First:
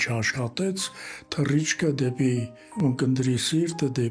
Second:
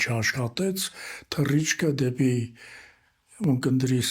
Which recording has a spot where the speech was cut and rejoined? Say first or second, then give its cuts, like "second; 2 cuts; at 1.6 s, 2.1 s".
first; 1 cut; at 2.6 s